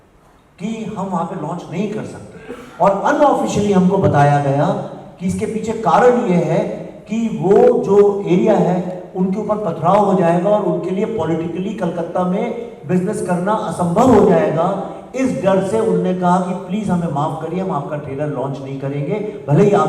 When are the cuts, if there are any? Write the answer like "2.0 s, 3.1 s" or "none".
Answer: none